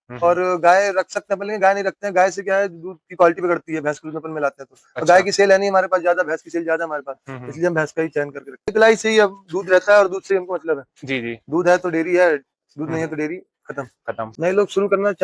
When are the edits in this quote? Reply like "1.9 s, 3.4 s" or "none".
8.7 s, 14.3 s